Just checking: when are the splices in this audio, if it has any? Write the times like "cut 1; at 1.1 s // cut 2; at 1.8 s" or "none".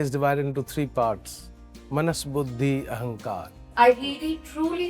cut 1; at 3.6 s